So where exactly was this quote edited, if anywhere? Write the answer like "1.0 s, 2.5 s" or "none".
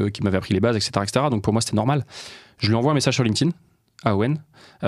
none